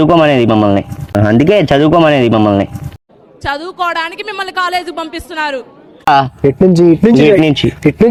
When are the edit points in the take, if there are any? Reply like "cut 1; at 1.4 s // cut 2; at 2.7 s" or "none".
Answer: none